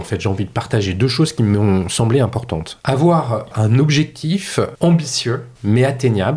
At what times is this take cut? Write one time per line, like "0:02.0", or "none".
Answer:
0:02.7
0:03.5
0:04.7
0:05.5